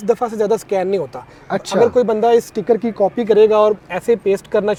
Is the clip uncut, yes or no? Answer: yes